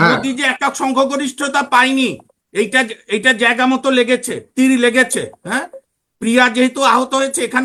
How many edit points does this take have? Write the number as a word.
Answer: zero